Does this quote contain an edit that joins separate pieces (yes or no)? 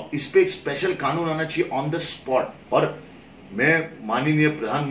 yes